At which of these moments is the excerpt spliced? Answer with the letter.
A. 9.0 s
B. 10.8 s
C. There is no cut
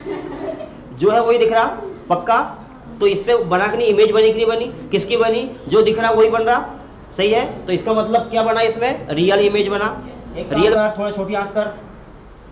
B